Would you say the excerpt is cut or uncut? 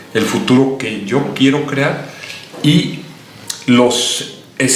uncut